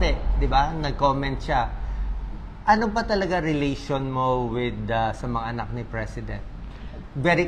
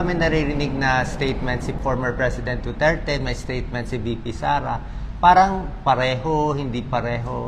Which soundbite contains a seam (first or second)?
second